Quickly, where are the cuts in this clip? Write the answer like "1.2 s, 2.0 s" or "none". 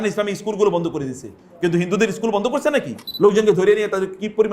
3.0 s